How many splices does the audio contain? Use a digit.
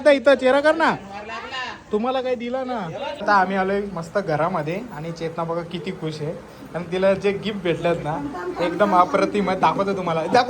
1